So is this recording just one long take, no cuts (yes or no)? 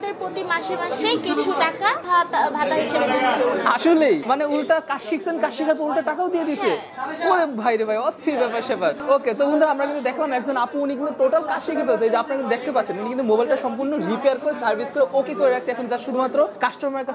yes